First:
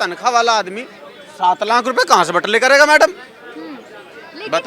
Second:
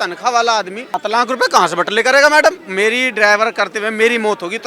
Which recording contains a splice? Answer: second; 2 cuts; at 1.0 s, 2.6 s

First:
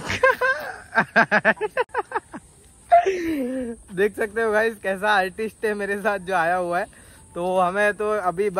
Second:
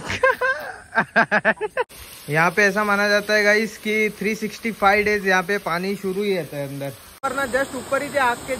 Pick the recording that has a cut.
second; 2 cuts; at 1.9 s, 7.2 s

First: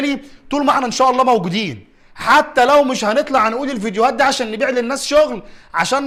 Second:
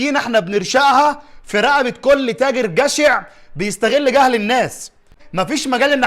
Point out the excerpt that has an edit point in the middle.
second; 1 cut; at 5.1 s

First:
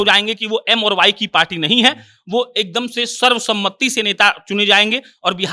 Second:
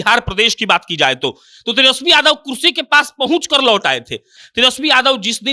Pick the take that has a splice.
second; 1 cut; at 4.3 s

